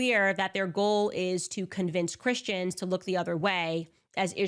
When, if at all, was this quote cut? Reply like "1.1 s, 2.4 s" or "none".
none